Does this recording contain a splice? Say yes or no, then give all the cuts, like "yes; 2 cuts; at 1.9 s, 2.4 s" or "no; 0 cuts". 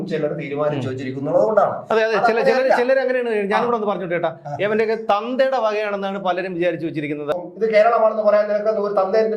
yes; 1 cut; at 7.3 s